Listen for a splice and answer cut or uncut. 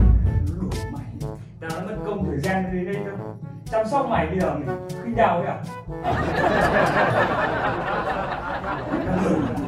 uncut